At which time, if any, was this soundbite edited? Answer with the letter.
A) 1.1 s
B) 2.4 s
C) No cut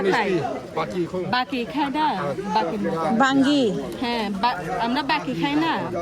C